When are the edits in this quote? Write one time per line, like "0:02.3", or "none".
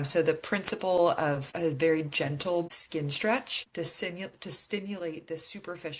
0:01.5
0:02.8
0:03.6